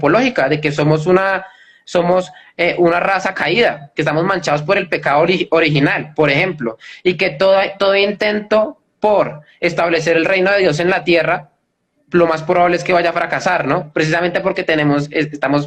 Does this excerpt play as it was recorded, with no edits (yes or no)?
yes